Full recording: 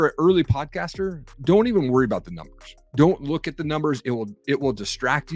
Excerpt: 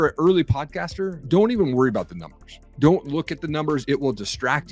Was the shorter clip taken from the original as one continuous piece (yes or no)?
no